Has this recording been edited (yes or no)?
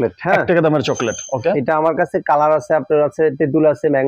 no